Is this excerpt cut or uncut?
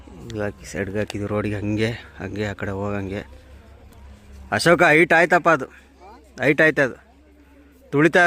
uncut